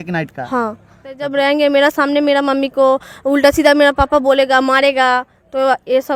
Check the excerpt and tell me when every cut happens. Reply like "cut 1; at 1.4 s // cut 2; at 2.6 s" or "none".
cut 1; at 1.2 s